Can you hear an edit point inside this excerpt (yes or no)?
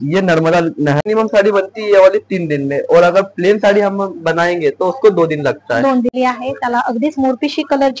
yes